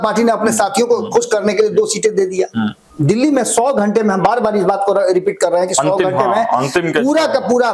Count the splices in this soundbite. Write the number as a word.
one